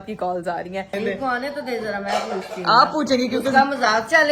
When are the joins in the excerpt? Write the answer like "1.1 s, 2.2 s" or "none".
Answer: 0.9 s